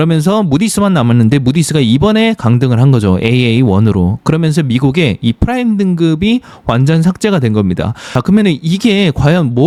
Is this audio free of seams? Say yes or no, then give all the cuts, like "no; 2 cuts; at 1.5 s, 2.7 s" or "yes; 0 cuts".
yes; 0 cuts